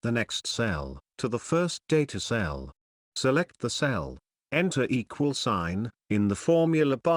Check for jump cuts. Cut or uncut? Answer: cut